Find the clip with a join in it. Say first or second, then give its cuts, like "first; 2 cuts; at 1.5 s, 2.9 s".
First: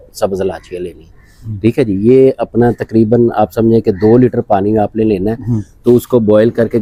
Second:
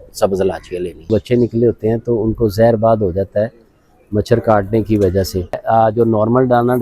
second; 2 cuts; at 1.1 s, 5.6 s